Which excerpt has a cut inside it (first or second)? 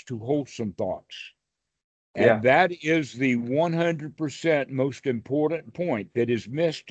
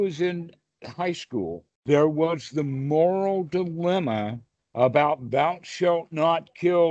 second